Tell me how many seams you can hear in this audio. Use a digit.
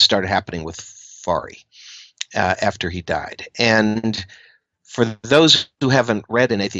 1